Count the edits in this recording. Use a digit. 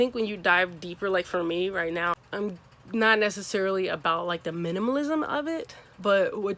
1